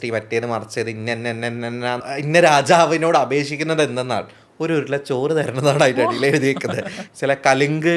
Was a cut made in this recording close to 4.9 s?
no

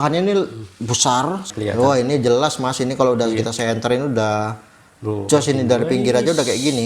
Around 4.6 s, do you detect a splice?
no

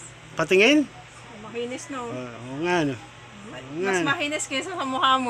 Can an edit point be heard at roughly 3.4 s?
no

